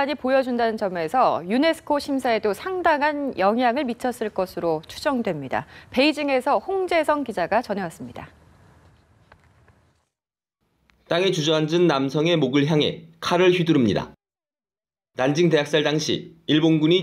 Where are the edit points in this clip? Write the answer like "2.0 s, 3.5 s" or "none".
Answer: 5.8 s